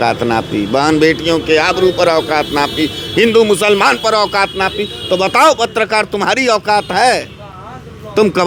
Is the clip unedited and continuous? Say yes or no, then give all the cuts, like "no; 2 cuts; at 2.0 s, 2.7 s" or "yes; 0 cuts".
yes; 0 cuts